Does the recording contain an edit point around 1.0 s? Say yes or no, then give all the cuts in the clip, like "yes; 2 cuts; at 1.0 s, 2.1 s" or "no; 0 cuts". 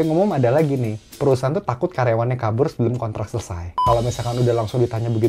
no; 1 cut; at 3.8 s